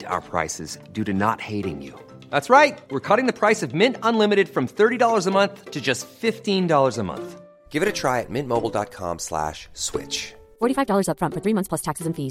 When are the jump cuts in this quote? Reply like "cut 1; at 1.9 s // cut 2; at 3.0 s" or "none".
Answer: none